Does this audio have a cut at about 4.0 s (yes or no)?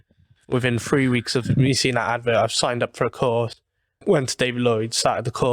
yes